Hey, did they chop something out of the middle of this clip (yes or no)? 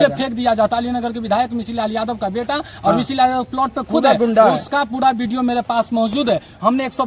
no